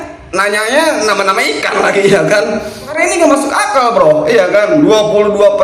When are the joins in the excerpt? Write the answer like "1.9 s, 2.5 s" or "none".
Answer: 3.0 s